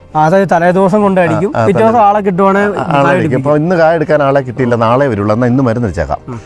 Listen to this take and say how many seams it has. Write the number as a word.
zero